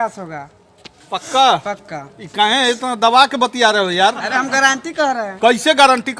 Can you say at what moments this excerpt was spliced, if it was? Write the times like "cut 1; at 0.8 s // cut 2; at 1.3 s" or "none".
none